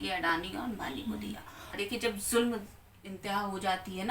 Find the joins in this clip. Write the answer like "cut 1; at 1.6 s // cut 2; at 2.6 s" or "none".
cut 1; at 1.8 s